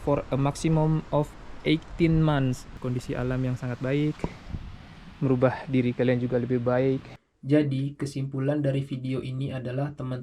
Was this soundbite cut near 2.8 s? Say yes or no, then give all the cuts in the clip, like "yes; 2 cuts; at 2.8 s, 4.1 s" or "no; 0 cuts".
yes; 2 cuts; at 2.8 s, 7.3 s